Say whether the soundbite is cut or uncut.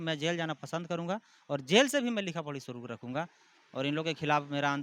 uncut